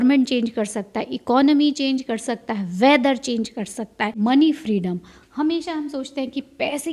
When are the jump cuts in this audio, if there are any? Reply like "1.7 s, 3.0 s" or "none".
4.2 s